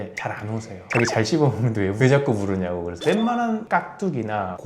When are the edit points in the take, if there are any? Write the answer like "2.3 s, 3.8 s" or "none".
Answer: 3.0 s